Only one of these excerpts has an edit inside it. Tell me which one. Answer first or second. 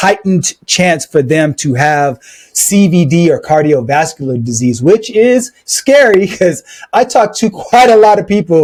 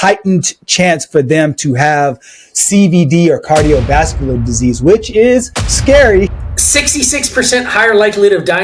second